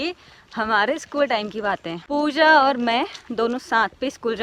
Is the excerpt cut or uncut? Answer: uncut